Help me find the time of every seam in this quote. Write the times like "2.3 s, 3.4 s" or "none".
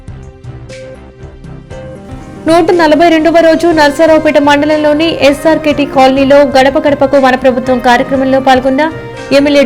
1.0 s